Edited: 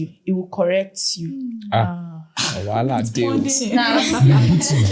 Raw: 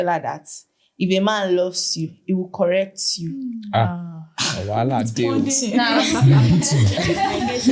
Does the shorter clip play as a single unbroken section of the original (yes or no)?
yes